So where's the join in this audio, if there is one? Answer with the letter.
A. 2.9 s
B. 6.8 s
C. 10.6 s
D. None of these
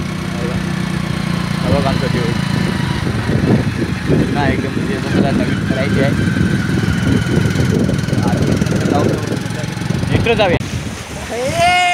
C